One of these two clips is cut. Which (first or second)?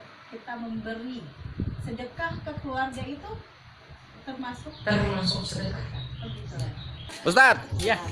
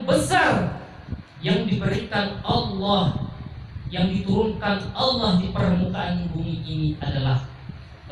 first